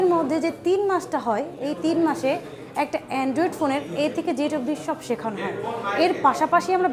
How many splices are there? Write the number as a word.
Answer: zero